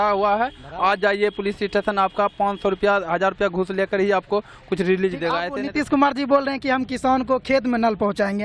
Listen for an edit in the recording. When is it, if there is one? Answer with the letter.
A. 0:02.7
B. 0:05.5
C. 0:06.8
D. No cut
B